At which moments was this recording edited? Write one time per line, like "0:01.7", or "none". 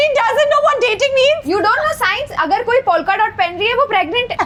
none